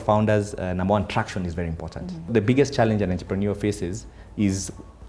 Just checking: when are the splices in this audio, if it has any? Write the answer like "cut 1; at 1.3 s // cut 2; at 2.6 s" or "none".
cut 1; at 2.3 s

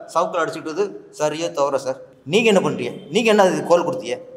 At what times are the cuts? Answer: cut 1; at 2.1 s

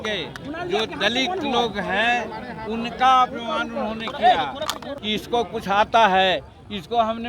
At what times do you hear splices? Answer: cut 1; at 4.9 s

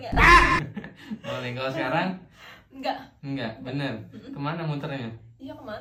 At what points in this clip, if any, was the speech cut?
none

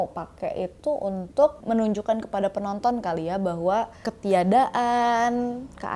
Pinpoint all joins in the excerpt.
cut 1; at 1.6 s // cut 2; at 4.0 s

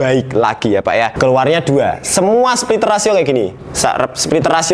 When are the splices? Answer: cut 1; at 1.1 s

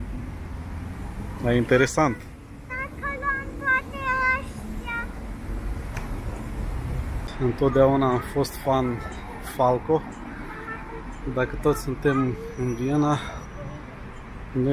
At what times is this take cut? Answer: cut 1; at 7.3 s

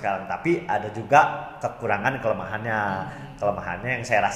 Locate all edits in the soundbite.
none

